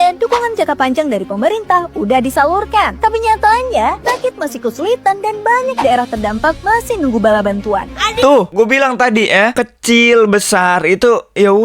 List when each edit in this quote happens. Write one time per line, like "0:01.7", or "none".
0:08.2